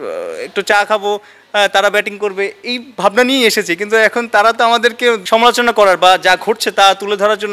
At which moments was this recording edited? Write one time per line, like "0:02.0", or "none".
0:05.2